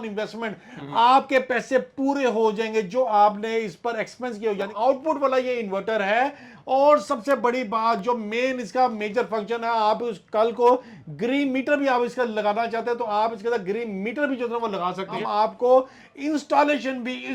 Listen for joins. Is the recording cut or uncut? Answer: cut